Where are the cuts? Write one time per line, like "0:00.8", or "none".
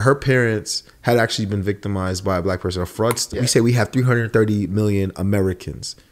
0:03.3